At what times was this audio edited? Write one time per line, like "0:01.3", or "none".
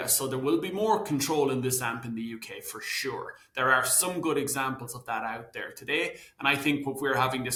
none